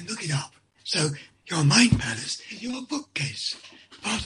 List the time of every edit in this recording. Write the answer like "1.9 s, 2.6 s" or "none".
none